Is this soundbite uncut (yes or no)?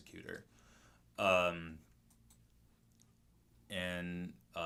yes